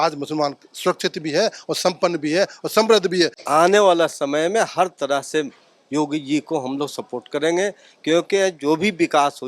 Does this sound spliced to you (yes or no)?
yes